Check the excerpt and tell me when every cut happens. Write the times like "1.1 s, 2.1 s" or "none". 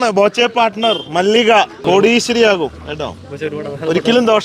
1.8 s